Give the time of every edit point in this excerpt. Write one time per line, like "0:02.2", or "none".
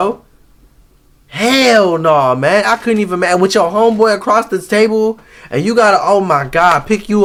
none